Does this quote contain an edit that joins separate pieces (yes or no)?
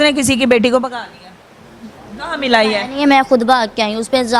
no